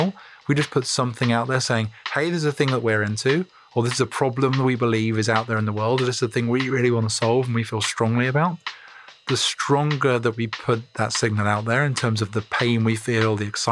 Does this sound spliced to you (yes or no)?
yes